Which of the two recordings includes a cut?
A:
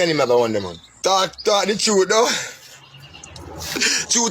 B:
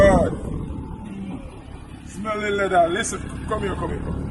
A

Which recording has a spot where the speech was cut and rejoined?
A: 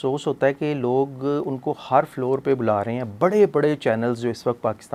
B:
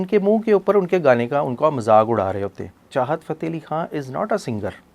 B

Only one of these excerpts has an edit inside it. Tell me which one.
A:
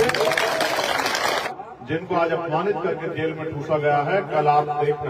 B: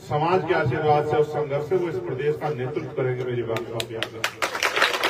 A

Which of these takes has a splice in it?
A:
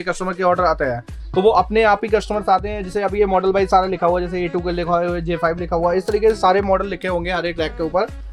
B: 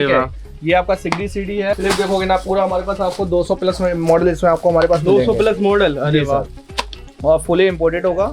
B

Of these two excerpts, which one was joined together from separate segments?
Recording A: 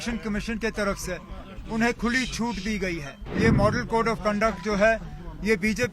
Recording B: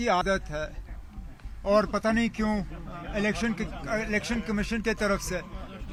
A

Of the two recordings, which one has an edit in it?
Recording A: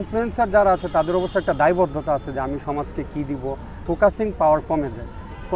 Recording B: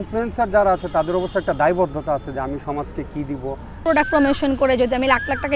B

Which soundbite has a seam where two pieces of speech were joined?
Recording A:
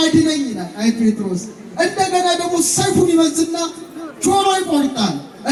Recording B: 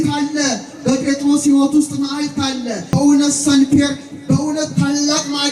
B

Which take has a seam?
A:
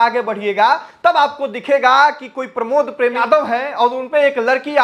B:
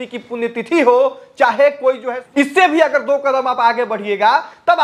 B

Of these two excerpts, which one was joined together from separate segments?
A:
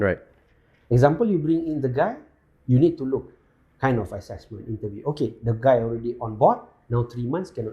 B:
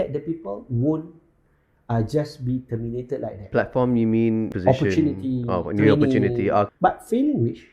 B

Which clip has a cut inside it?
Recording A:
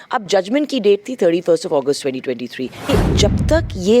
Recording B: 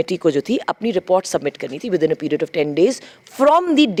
A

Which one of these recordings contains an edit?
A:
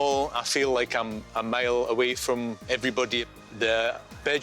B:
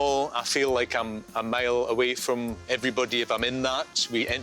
A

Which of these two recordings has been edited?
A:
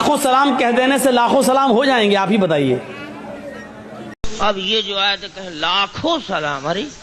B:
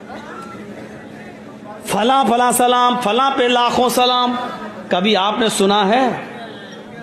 A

